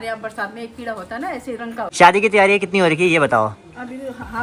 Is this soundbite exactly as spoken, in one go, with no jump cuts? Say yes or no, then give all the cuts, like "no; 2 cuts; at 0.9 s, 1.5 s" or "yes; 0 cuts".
no; 1 cut; at 1.9 s